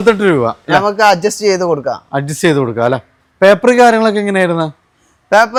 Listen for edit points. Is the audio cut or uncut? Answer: uncut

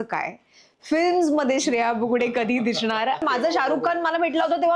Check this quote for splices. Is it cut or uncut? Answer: cut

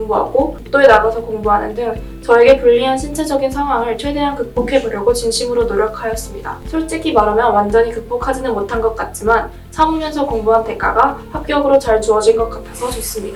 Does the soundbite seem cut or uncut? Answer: uncut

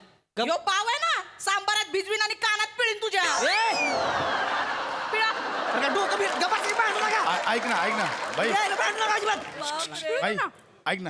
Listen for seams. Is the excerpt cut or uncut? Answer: uncut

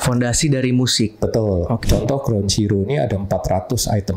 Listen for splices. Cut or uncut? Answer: cut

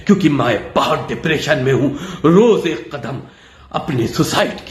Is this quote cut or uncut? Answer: uncut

